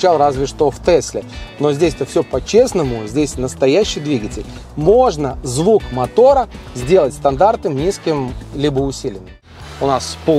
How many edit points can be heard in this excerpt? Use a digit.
1